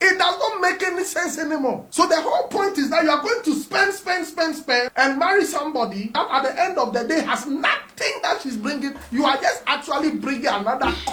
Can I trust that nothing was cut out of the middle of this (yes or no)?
yes